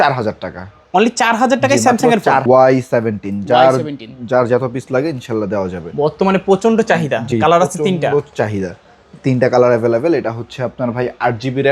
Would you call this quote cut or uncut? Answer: cut